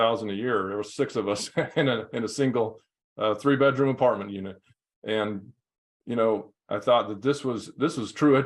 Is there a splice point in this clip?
no; 0 cuts

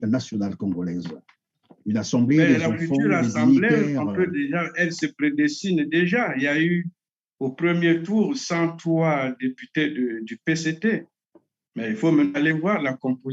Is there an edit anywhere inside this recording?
no; 0 cuts

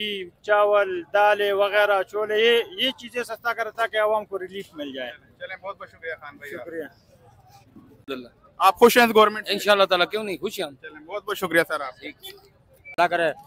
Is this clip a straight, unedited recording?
no; 2 cuts; at 8.1 s, 12.6 s

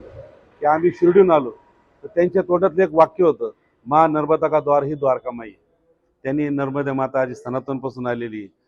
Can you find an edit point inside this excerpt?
no; 0 cuts

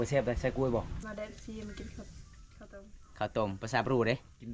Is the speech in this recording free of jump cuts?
no; 1 cut; at 0.9 s

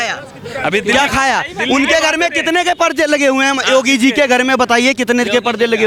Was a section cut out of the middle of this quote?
no; 0 cuts

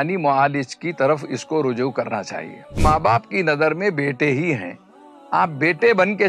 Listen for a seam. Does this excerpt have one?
yes; 1 cut; at 2.8 s

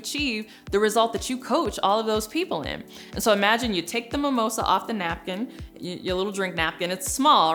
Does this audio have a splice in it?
no; 0 cuts

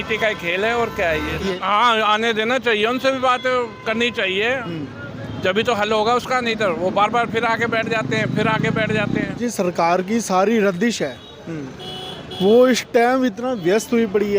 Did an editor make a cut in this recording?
yes; 2 cuts; at 1.5 s, 9.4 s

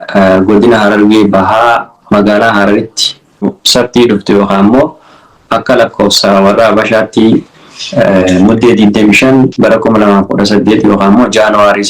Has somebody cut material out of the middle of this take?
yes; 1 cut; at 3.6 s

